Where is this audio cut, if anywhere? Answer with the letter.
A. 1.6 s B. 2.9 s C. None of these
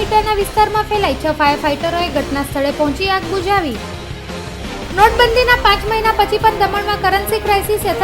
C